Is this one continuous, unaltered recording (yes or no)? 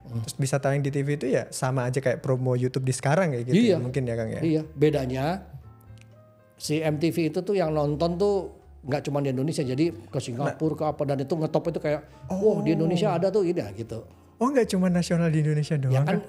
yes